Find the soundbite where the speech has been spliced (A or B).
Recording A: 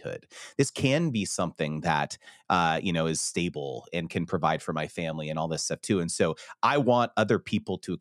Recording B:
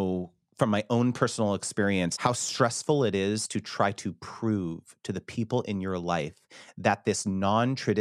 B